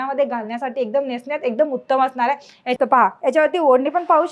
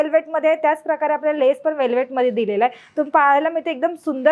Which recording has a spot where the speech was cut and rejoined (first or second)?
first